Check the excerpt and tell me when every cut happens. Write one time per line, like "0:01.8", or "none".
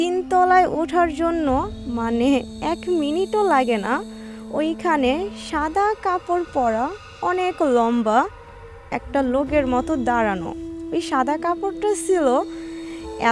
none